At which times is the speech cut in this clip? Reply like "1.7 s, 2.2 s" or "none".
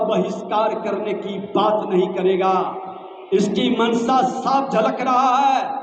none